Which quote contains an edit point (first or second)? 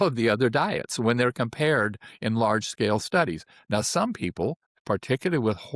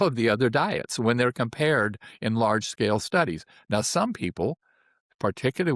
first